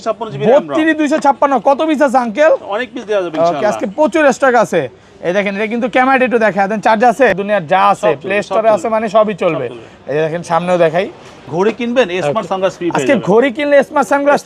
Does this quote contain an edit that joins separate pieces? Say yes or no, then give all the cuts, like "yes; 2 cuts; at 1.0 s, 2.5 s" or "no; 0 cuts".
yes; 2 cuts; at 7.3 s, 11.5 s